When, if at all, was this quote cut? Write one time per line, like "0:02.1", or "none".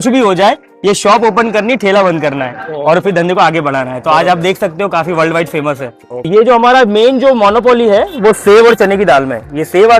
0:06.3